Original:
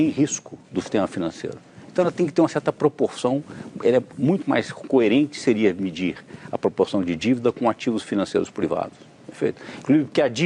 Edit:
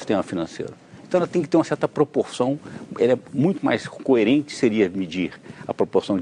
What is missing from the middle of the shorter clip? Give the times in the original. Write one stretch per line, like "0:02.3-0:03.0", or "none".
none

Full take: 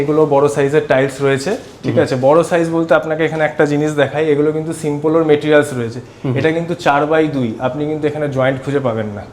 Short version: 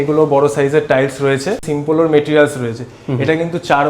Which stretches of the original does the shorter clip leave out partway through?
0:01.7-0:04.8

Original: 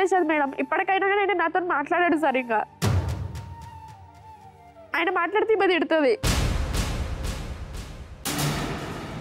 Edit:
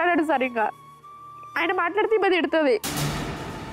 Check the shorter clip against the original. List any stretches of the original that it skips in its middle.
0:02.7-0:04.2
0:06.2-0:08.2

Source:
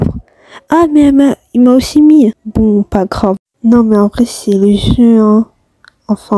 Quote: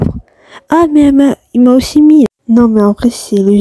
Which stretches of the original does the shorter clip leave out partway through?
0:02.4-0:03.5

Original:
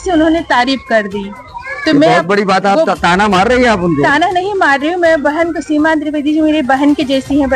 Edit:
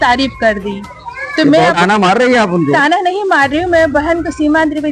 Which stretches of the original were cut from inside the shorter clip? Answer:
0:02.2-0:03.1

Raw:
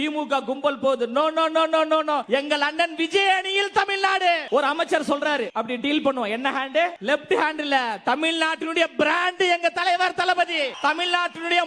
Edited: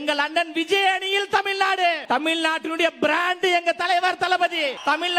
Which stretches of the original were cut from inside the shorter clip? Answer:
0:04.4-0:08.0

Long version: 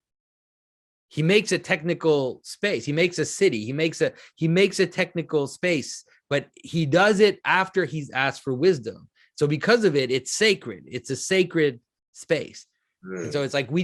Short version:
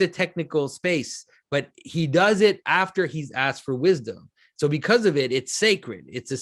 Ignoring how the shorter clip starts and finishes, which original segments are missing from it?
none

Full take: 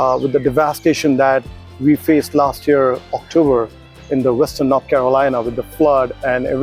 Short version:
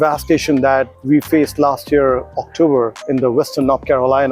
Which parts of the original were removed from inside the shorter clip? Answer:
0:01.5-0:01.7
0:03.7-0:04.0

